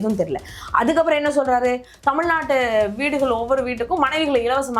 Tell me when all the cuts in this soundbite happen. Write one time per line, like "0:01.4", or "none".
none